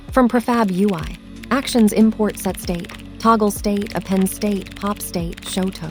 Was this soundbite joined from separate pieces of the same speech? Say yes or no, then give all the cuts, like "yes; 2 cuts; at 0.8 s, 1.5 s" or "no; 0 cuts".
no; 0 cuts